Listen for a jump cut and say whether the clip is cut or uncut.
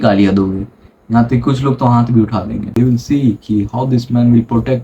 cut